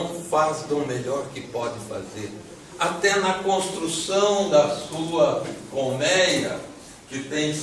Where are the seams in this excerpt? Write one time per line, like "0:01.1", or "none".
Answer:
0:05.6